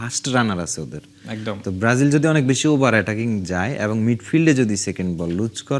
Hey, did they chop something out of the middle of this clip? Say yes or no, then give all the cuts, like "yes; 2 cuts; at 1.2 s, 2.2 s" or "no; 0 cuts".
no; 0 cuts